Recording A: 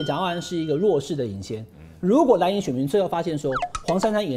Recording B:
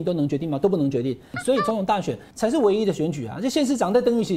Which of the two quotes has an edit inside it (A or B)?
B